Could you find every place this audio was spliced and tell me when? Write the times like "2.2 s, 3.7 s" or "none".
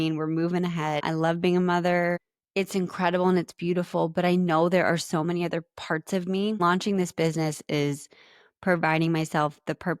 1.0 s, 2.4 s, 6.6 s